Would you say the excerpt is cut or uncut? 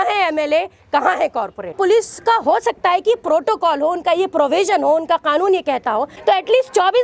cut